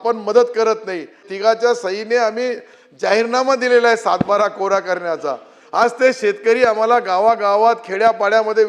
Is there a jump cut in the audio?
yes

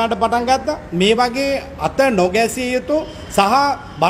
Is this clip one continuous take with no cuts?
yes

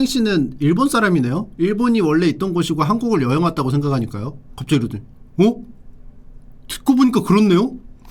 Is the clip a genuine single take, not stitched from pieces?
no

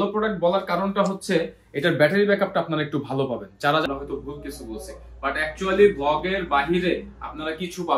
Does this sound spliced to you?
yes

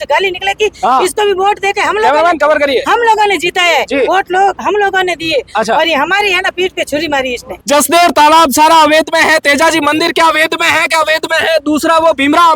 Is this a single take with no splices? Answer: no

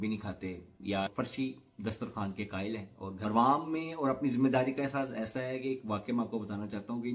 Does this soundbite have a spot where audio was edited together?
yes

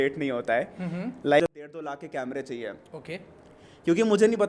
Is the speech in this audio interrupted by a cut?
yes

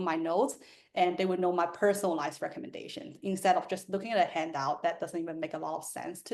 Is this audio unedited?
yes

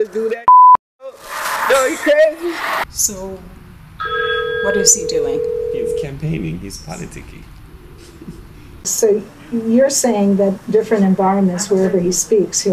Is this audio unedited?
no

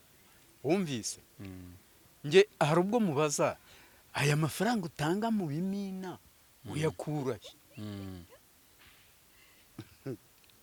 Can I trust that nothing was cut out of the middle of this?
yes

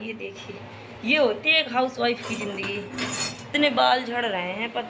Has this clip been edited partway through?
yes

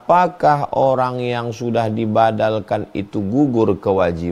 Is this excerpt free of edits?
yes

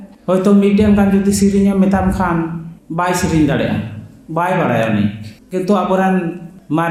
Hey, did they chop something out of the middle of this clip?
no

